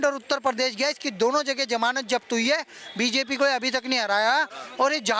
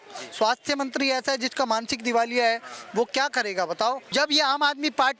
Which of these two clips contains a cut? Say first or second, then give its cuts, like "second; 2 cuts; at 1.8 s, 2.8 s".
second; 1 cut; at 4.0 s